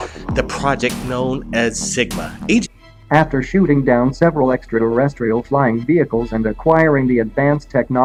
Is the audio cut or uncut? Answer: uncut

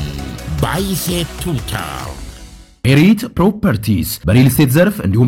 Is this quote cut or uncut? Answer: cut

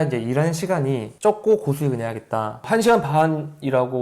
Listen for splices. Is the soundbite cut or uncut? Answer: cut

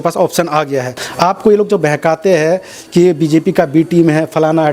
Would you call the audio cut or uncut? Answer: cut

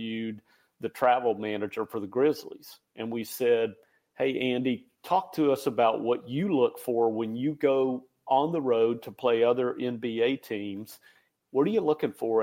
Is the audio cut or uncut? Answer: uncut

